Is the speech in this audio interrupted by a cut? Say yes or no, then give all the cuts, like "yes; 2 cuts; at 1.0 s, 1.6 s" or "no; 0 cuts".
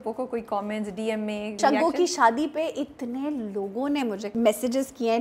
yes; 2 cuts; at 1.5 s, 4.2 s